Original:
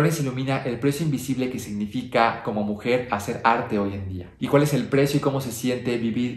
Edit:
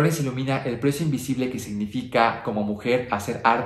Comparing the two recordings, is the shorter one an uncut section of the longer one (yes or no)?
yes